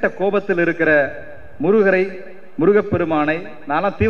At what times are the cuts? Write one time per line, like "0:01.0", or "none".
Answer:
none